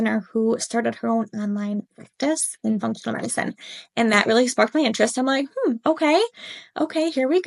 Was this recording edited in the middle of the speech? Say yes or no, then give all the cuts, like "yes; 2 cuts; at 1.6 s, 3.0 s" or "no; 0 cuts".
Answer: no; 0 cuts